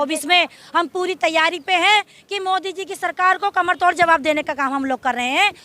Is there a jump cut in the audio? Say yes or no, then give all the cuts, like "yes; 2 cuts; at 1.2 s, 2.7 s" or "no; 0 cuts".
no; 0 cuts